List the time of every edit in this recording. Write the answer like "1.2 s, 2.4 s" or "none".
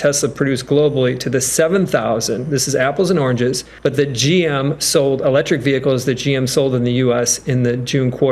3.7 s